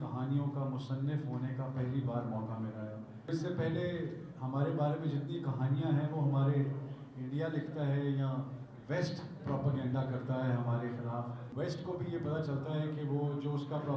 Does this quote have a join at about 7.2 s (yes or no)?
no